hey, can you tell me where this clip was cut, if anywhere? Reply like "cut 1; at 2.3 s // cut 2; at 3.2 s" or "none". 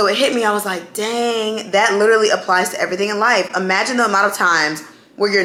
none

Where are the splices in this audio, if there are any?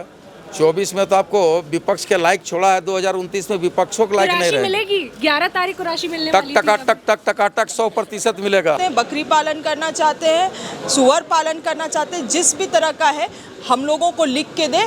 cut 1; at 8.8 s

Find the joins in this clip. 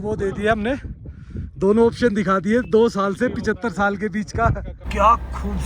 cut 1; at 4.7 s

